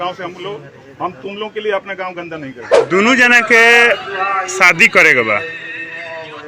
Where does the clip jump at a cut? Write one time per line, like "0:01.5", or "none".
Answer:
0:02.7